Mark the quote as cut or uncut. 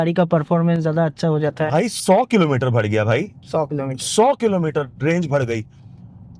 uncut